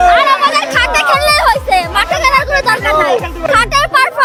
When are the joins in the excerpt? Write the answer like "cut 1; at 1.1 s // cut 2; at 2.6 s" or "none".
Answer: none